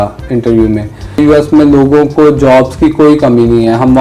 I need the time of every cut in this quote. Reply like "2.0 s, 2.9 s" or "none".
1.2 s